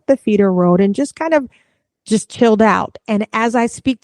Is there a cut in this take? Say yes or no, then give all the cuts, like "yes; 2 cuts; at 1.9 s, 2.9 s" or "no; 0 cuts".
no; 0 cuts